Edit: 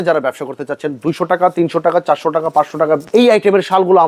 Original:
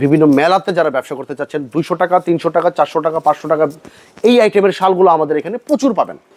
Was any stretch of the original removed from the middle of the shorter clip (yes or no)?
yes